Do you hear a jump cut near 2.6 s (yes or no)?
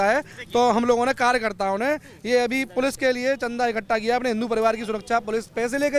no